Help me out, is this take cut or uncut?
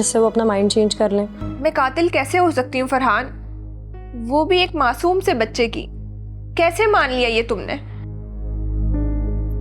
cut